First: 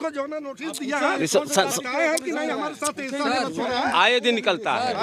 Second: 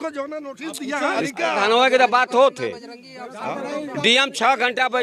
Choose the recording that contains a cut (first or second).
second